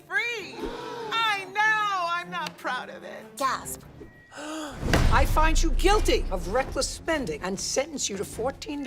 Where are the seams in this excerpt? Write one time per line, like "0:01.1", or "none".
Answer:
0:00.9
0:05.6